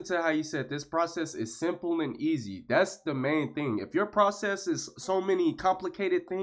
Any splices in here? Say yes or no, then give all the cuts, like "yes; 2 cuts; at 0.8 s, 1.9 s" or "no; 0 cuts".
no; 0 cuts